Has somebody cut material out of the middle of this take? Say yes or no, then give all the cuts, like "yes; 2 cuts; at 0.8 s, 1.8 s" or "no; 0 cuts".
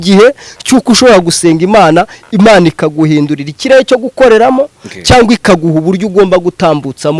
no; 0 cuts